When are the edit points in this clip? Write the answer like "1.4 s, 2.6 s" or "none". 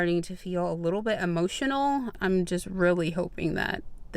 2.1 s

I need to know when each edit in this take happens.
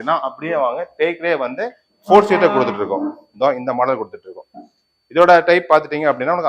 none

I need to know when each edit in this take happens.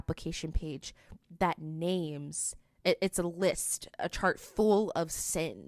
none

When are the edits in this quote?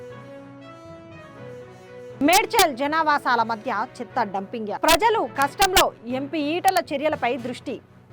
2.1 s

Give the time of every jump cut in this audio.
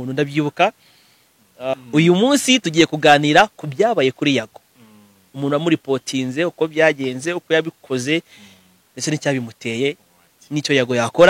1.7 s

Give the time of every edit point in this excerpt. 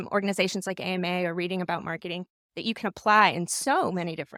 none

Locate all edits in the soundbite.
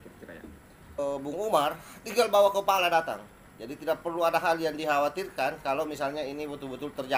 1.0 s

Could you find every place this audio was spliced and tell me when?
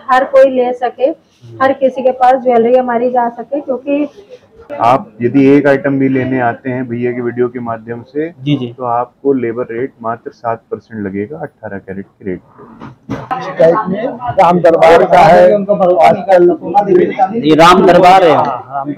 4.6 s, 13.3 s

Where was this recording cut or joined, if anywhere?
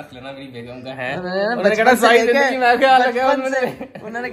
none

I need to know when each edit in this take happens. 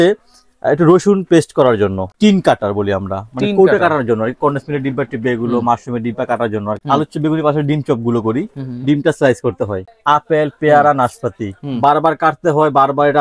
2.1 s, 6.8 s, 9.9 s

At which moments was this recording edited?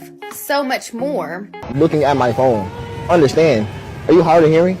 1.7 s

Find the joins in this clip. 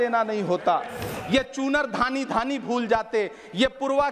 1.1 s

